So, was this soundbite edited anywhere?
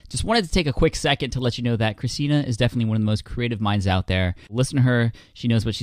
yes; 1 cut; at 4.5 s

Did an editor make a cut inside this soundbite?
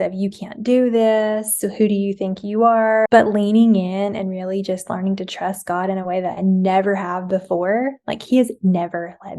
yes; 1 cut; at 3.1 s

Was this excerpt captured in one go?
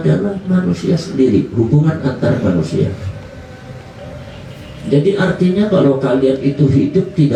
yes; 0 cuts

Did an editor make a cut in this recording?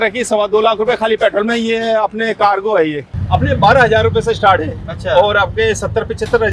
yes; 1 cut; at 3.1 s

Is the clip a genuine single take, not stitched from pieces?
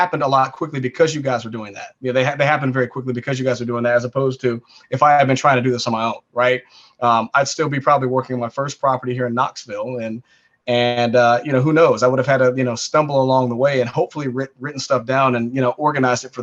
yes; 0 cuts

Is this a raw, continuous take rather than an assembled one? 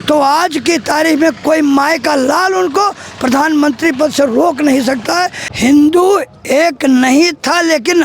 no; 1 cut; at 5.4 s

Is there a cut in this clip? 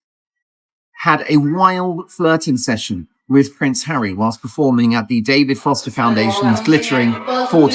no; 0 cuts

